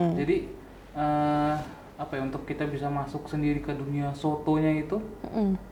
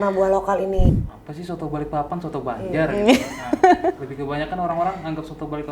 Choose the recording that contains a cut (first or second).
second